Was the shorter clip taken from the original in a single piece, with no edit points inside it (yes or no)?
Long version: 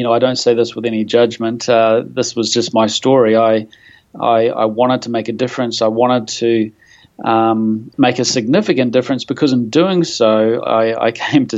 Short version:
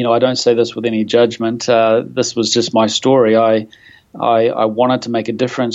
yes